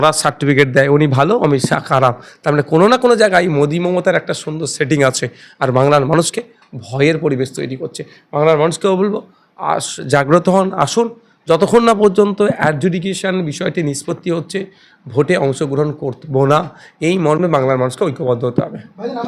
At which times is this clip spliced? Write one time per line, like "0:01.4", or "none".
none